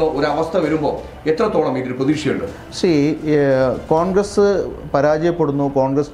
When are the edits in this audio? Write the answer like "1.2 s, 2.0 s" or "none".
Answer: none